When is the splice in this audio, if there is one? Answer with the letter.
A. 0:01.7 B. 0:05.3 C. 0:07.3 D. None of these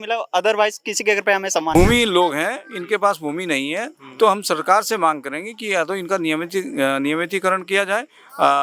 A